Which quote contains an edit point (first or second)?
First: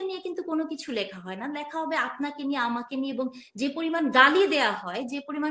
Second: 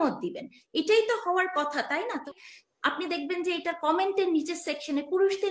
second